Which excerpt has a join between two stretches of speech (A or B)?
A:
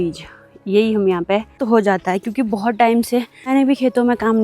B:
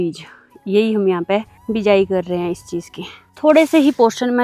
A